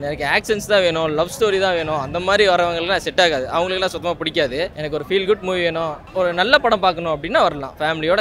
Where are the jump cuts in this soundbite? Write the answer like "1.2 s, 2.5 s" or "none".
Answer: none